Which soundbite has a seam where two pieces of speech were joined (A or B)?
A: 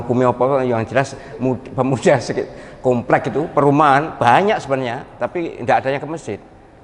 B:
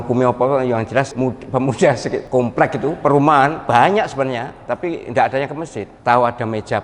B